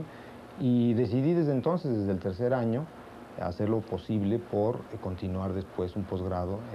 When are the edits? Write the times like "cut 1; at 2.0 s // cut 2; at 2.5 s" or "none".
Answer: none